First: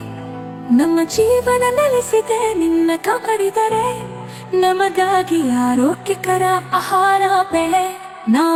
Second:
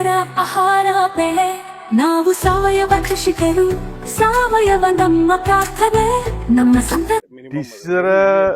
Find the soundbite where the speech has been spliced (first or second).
second